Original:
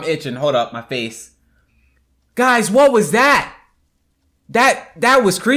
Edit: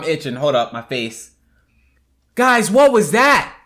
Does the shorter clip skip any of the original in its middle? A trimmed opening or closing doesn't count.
no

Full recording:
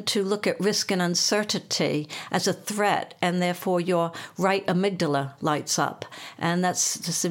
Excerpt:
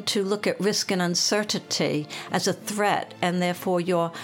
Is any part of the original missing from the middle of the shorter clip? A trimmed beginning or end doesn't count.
no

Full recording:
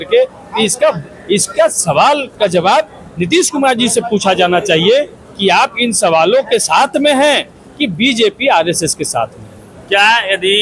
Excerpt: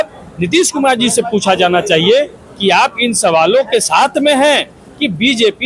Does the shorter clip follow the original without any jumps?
yes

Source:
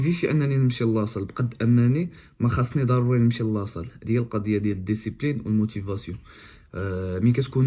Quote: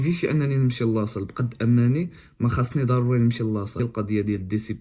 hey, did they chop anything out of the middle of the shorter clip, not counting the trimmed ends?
yes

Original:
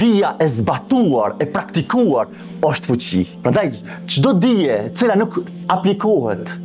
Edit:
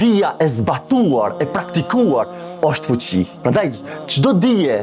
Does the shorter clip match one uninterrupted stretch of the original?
yes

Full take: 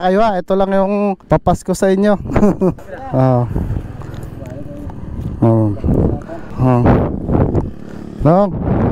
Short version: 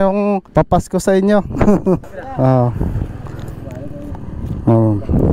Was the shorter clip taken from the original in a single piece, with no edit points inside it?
yes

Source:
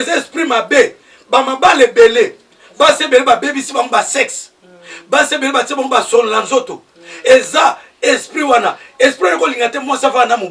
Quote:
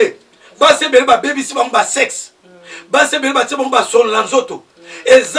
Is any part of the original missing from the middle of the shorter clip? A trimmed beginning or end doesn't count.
no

